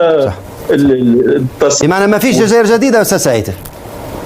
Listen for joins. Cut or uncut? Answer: cut